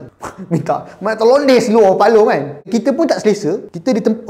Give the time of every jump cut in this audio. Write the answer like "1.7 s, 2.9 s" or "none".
2.6 s

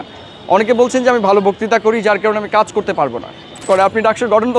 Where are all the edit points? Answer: 3.7 s

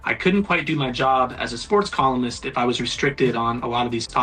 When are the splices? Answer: none

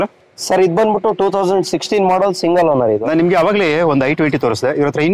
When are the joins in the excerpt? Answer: 3.0 s

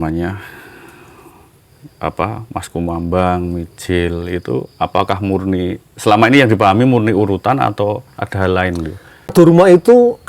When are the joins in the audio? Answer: 9.3 s

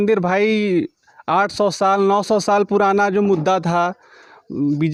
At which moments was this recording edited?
none

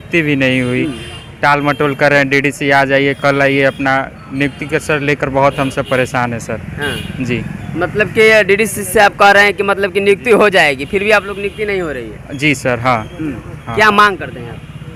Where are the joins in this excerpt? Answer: none

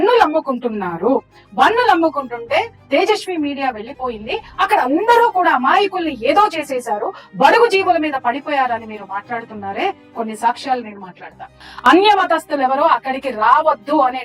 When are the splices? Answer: none

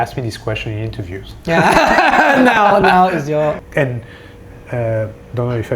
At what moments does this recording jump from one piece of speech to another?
3.6 s

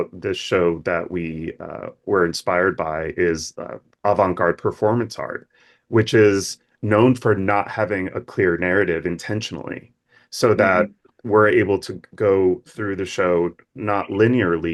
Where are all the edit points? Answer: none

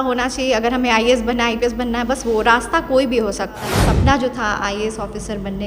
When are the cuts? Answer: 3.7 s

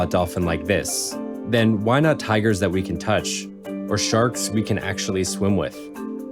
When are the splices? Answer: none

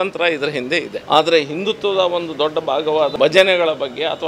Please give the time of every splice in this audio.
0.9 s, 3.1 s

